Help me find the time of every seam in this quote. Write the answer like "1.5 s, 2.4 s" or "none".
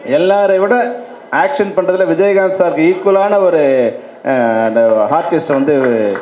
none